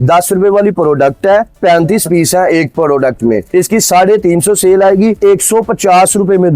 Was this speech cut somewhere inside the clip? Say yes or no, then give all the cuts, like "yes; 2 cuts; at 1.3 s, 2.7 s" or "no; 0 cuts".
yes; 2 cuts; at 3.4 s, 5.2 s